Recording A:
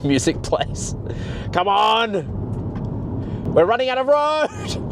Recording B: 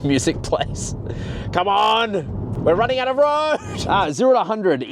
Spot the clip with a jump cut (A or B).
B